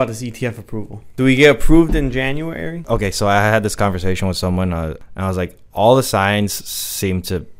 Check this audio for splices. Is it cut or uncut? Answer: cut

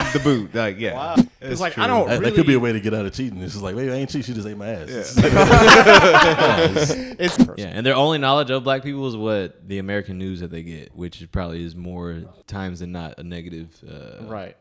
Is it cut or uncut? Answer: cut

